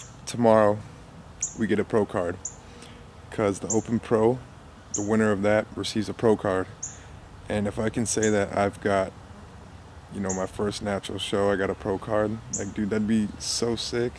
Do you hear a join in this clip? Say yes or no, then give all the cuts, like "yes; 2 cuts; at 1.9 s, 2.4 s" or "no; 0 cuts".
no; 0 cuts